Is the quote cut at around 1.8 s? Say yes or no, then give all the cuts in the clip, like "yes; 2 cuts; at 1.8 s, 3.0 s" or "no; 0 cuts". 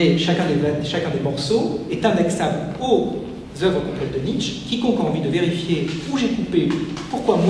no; 0 cuts